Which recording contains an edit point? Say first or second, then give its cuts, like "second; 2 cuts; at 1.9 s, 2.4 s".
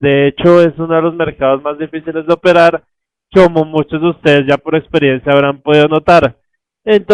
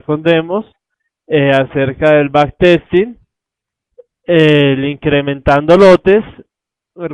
first; 1 cut; at 1.8 s